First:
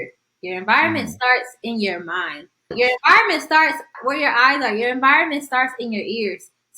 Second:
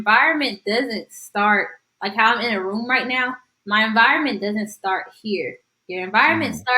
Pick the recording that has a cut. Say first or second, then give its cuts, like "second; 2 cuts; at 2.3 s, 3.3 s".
first; 2 cuts; at 2.7 s, 3.9 s